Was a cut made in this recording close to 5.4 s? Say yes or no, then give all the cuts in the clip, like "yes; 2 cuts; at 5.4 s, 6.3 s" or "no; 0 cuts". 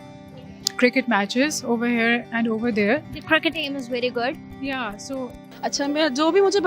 yes; 1 cut; at 5.4 s